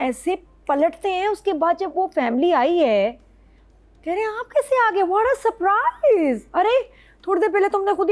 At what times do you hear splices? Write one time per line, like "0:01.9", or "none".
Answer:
none

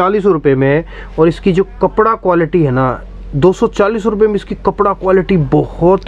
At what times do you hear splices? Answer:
none

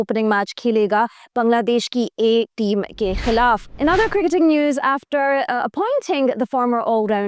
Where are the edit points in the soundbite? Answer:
0:03.7

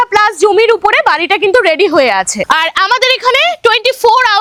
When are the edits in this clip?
none

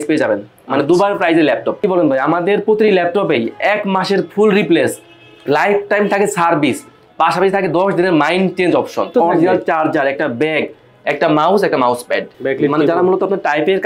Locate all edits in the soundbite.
0:01.8
0:09.1
0:12.3

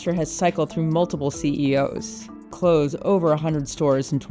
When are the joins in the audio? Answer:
0:02.4

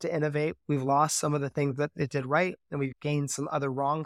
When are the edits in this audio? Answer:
0:02.9

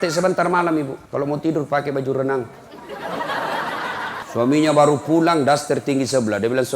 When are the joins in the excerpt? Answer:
0:01.0
0:04.2

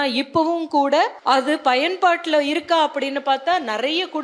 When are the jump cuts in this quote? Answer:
0:01.2

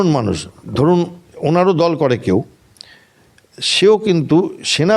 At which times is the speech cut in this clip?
none

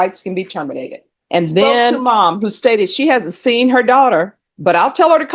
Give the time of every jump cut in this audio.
0:02.0

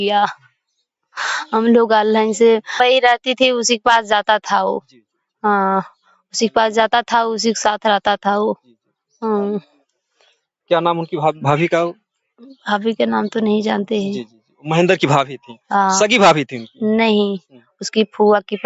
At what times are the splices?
0:02.7

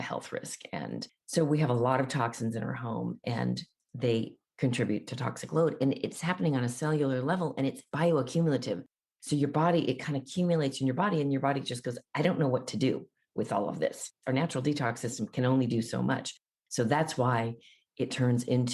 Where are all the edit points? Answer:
none

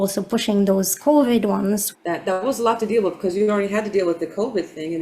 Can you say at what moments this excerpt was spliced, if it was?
0:01.9

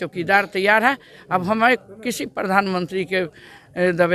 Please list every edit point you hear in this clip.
none

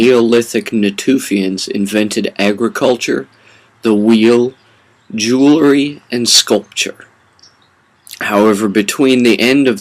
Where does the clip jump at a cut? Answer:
0:04.6

